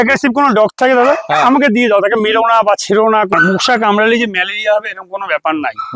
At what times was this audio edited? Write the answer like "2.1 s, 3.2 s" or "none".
3.3 s